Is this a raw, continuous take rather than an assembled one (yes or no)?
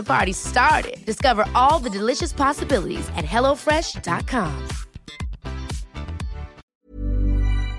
no